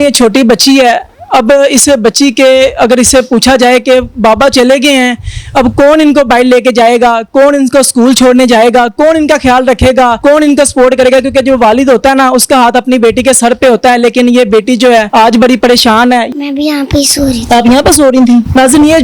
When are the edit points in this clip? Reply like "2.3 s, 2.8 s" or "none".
16.3 s